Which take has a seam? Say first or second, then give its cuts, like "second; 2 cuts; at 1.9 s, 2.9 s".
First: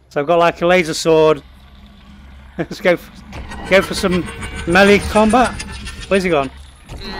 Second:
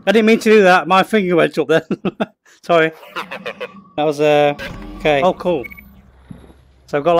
second; 1 cut; at 5.2 s